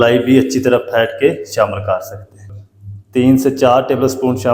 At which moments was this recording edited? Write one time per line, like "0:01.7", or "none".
0:02.3

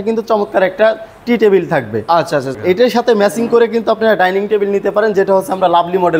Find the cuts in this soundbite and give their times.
0:02.5

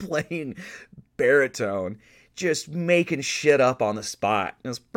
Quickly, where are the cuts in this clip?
none

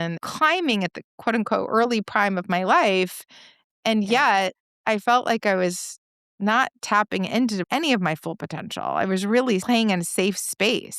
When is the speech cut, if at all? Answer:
0:09.6

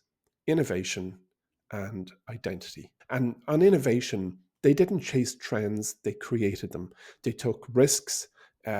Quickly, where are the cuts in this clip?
0:02.9

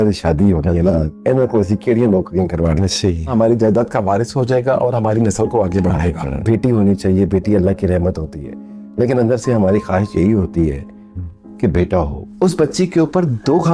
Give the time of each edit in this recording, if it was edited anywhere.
0:03.3
0:06.4
0:12.2

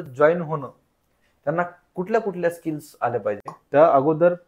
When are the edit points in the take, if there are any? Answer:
0:03.5

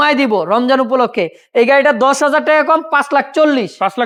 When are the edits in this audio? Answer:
none

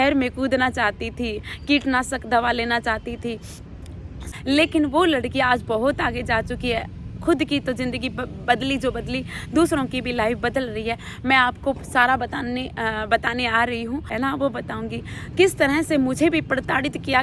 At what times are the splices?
0:04.2
0:14.1

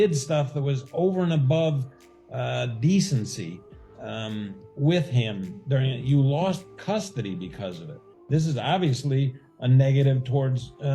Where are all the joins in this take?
0:08.1

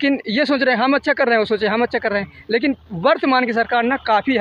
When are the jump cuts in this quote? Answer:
none

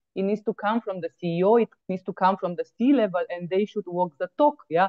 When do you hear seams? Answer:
none

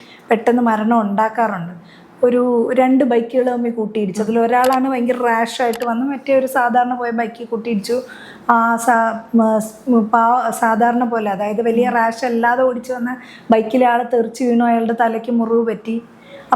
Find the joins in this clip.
none

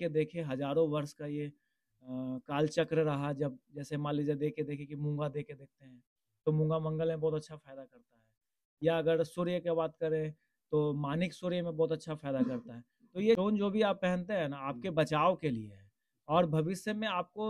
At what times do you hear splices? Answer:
0:13.4

